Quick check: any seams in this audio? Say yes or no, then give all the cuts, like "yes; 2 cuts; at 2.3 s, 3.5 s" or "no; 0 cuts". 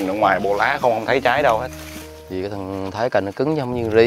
yes; 1 cut; at 2.3 s